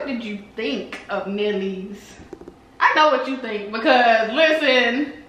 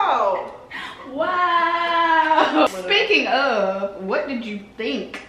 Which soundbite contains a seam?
second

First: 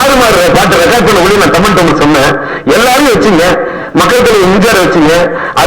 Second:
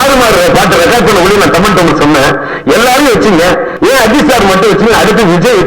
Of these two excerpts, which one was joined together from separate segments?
second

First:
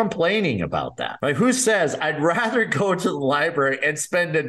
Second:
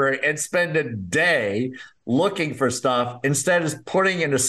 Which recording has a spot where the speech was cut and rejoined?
first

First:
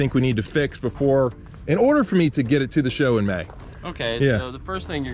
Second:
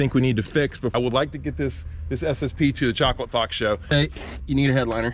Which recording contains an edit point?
second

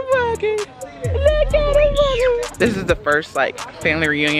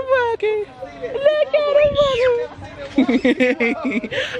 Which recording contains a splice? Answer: first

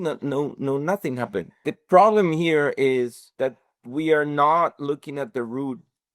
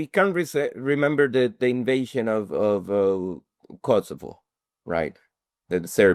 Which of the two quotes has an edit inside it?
first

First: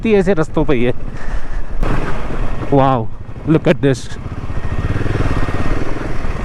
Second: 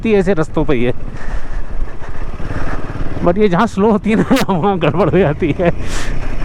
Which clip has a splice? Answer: first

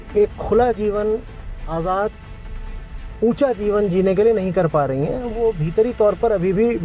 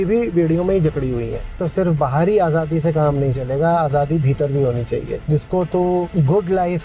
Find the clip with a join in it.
second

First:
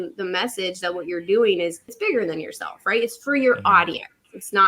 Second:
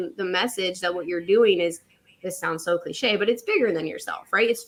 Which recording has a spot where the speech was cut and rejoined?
first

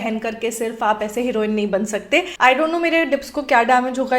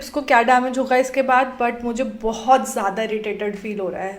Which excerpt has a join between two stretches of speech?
first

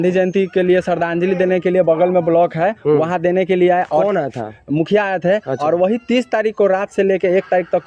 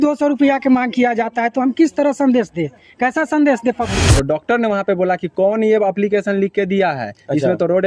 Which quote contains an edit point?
second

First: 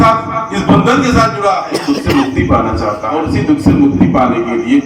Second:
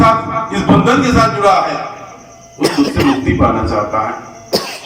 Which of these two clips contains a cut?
first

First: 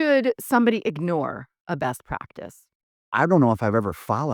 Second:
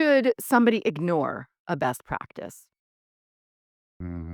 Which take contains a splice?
first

